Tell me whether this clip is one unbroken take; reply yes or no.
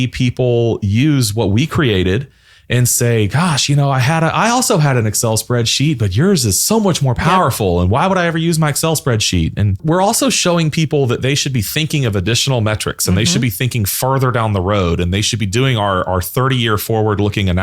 no